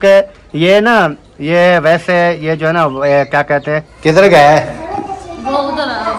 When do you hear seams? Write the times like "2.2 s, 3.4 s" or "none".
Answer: 3.9 s